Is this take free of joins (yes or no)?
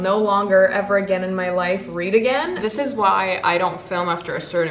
no